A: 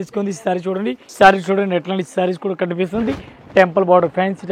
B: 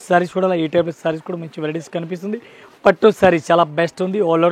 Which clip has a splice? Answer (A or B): A